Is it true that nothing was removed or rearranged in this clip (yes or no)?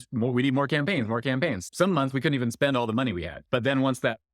no